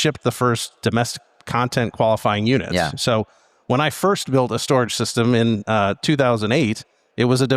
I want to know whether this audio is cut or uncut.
uncut